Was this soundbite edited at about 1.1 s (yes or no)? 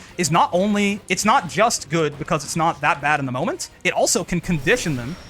yes